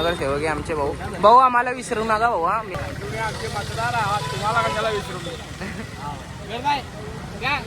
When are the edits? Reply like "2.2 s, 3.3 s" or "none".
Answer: 2.7 s